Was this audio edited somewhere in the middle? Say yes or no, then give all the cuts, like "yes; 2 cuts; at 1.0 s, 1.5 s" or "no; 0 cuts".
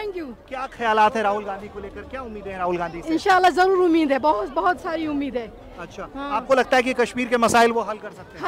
no; 0 cuts